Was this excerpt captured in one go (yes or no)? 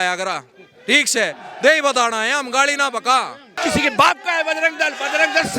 no